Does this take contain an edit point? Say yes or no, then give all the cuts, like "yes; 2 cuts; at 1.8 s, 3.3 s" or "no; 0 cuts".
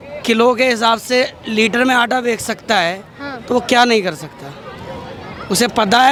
no; 0 cuts